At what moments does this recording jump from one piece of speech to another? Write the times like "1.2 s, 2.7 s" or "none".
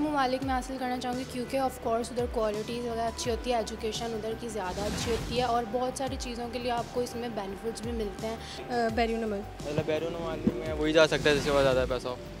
none

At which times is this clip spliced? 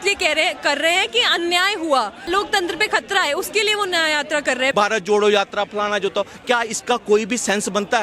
2.2 s, 4.7 s

